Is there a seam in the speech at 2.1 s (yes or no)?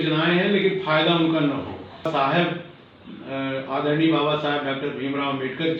yes